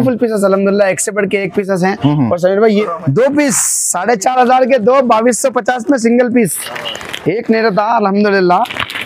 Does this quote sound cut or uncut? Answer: cut